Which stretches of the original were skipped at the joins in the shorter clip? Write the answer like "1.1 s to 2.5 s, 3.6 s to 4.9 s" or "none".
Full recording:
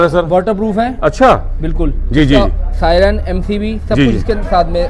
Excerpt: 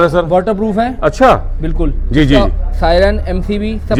none